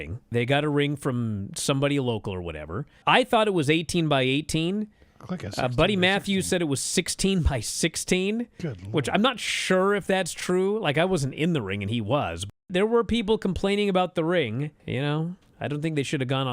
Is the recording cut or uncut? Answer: cut